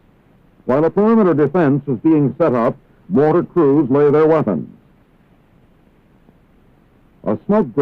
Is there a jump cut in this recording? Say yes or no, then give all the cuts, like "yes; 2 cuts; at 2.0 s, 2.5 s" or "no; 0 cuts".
yes; 1 cut; at 0.9 s